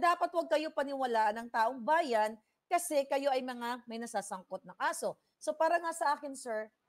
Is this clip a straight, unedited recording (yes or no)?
yes